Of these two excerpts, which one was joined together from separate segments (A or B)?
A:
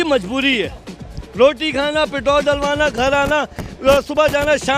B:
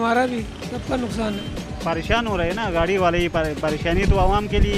B